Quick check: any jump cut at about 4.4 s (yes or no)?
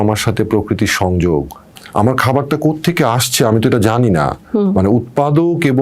no